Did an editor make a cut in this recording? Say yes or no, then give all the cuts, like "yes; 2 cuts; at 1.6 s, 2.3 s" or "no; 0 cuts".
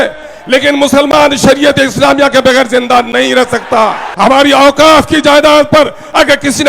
yes; 1 cut; at 4.0 s